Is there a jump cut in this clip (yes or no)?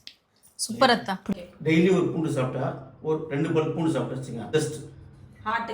yes